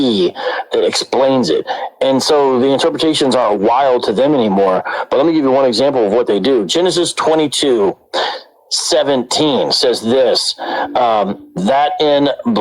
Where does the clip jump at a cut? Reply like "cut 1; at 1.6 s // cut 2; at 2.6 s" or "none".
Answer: cut 1; at 3.3 s